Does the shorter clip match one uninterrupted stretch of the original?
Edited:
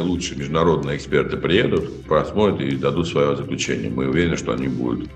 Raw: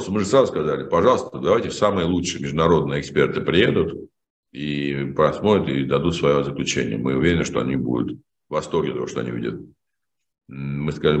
no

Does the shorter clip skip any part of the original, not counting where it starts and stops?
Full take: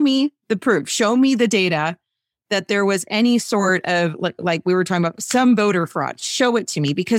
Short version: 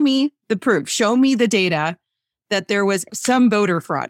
yes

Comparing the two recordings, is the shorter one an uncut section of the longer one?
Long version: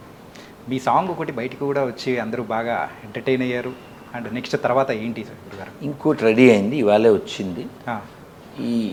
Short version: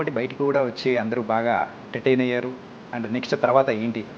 yes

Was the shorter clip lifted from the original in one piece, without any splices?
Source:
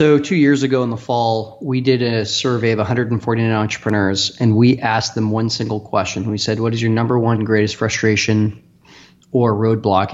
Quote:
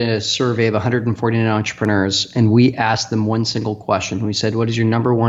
yes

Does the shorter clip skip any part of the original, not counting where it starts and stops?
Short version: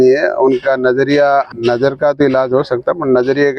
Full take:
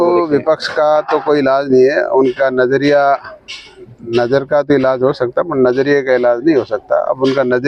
yes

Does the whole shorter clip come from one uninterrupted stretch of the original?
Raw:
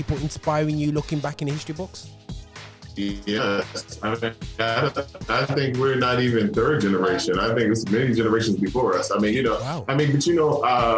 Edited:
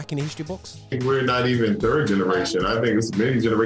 no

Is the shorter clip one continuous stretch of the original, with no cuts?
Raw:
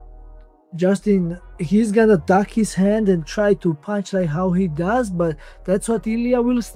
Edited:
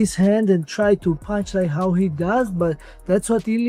yes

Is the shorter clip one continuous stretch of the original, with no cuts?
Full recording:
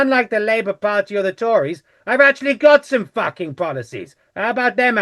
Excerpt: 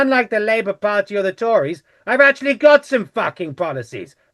yes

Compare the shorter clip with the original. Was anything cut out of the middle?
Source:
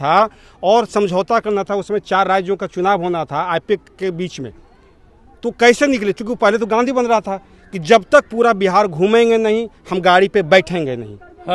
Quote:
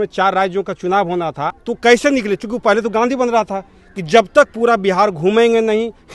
yes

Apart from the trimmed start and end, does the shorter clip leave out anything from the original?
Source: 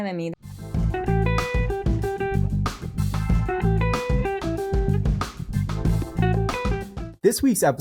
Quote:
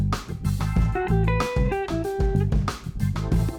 no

